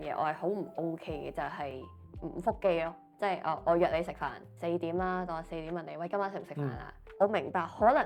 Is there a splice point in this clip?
yes; 2 cuts; at 3.1 s, 7.0 s

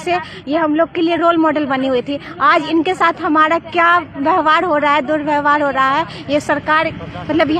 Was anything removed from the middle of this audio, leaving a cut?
no; 0 cuts

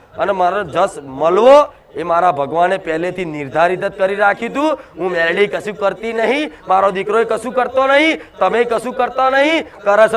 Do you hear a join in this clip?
no; 0 cuts

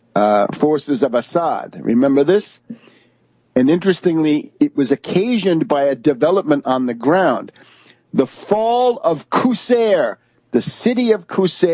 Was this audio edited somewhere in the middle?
no; 0 cuts

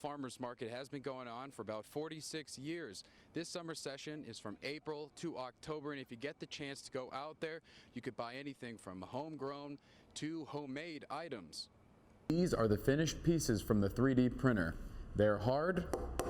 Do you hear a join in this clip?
yes; 1 cut; at 12.3 s

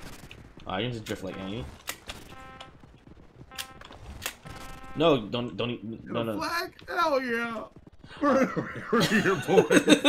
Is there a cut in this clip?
no; 0 cuts

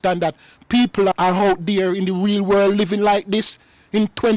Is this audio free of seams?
yes; 0 cuts

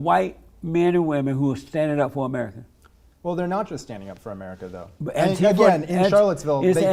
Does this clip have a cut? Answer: no; 0 cuts

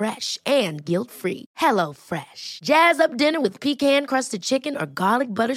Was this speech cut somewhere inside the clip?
no; 0 cuts

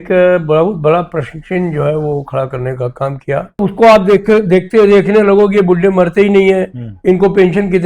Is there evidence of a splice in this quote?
yes; 1 cut; at 3.6 s

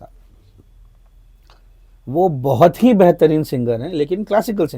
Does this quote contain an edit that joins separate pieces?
no; 0 cuts

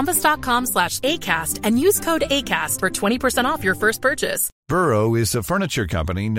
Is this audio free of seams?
no; 1 cut; at 4.5 s

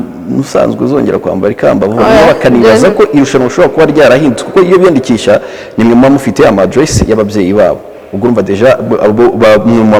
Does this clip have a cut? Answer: no; 0 cuts

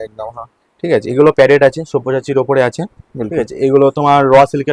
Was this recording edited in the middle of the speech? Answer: no; 0 cuts

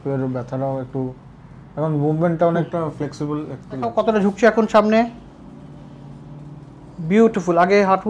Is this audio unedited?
no; 1 cut; at 4.0 s

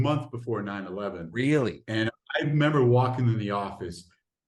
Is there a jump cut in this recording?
no; 0 cuts

